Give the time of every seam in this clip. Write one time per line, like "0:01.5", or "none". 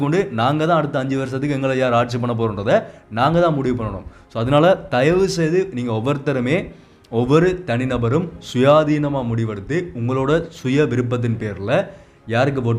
none

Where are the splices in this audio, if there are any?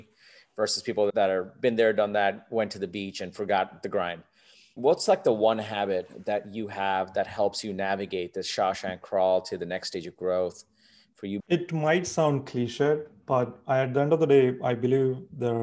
0:04.6
0:11.4

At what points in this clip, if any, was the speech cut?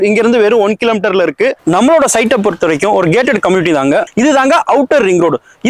0:01.6
0:04.1

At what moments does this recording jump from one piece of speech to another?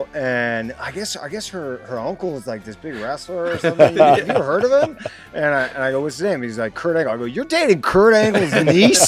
none

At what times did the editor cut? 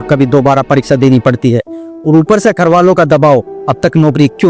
none

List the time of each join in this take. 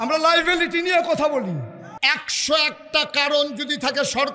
0:01.8

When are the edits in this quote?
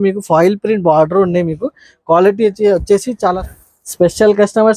0:03.4

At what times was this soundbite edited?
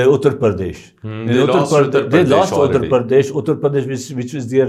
none

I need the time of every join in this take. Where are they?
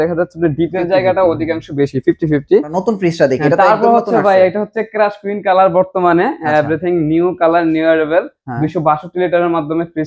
0:02.8

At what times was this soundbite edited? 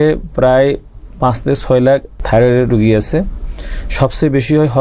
0:02.2

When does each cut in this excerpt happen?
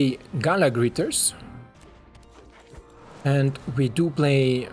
0:01.8

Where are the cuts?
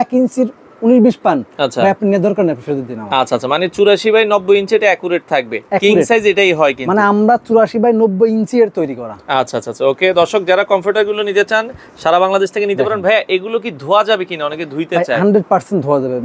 none

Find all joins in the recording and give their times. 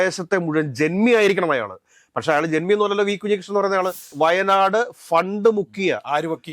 0:04.1

